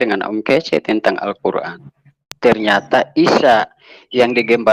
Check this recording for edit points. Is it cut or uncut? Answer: cut